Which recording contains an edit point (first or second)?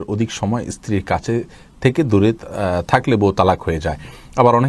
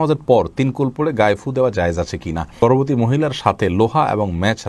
second